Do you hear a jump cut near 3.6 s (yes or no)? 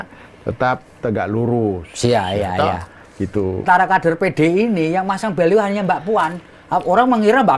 yes